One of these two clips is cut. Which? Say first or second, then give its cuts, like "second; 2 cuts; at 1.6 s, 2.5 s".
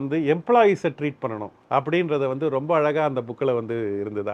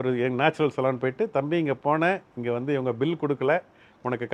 first; 1 cut; at 1.5 s